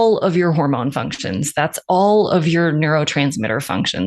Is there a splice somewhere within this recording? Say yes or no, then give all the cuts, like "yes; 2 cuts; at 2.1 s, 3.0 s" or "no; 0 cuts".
no; 0 cuts